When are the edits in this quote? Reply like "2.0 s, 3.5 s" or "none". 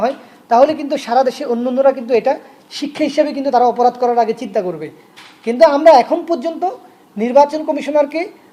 none